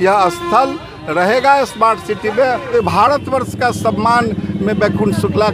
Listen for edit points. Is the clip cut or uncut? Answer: cut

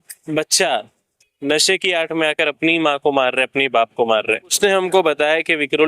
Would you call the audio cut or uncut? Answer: cut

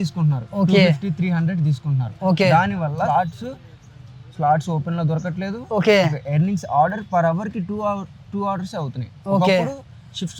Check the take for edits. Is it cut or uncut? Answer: cut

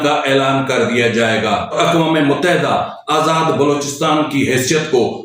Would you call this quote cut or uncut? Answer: cut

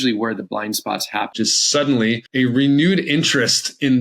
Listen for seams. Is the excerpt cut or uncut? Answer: cut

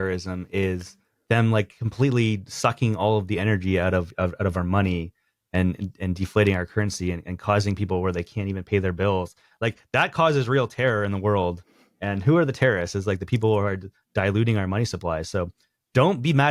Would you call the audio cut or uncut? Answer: uncut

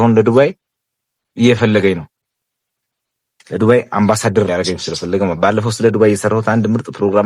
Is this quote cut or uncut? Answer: uncut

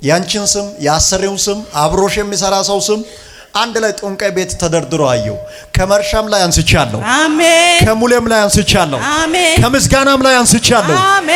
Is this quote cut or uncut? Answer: uncut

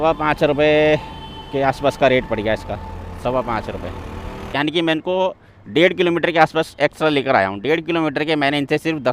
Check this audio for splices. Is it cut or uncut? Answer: cut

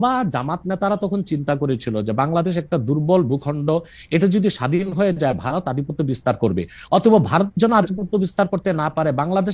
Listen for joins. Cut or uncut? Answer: uncut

